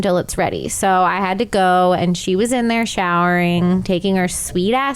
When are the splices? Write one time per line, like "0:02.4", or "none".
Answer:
none